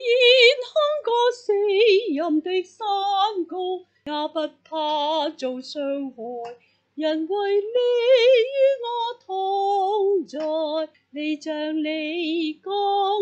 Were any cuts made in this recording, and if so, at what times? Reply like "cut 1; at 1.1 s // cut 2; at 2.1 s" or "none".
cut 1; at 3.9 s